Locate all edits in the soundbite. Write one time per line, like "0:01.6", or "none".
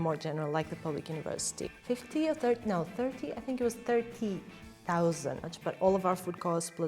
0:01.7
0:05.5